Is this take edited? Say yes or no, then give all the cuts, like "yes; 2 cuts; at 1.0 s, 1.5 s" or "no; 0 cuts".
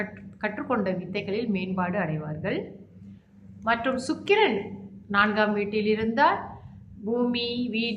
no; 0 cuts